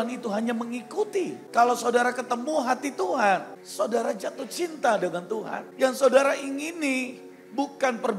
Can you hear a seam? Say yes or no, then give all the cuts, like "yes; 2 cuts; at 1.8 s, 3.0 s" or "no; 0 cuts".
yes; 3 cuts; at 1.4 s, 3.6 s, 5.6 s